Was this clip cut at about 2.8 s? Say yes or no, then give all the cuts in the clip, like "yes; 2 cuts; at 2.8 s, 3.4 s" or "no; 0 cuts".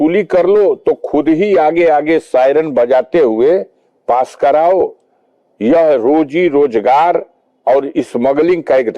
no; 0 cuts